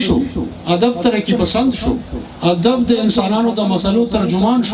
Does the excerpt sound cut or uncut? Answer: uncut